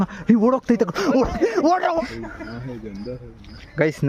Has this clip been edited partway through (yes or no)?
yes